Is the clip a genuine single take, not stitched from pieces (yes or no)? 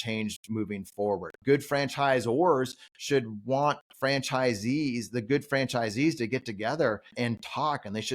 no